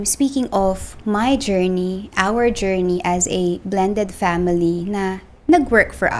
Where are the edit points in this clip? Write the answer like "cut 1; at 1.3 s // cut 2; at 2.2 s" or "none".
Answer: none